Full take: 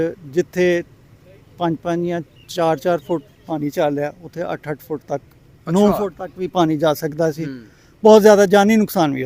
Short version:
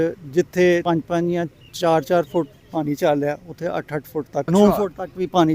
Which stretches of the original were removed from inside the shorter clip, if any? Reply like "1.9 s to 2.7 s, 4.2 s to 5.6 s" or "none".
0.8 s to 1.6 s, 5.2 s to 5.7 s